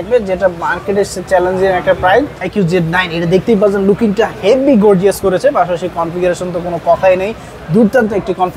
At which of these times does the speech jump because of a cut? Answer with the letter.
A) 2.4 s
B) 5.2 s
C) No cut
A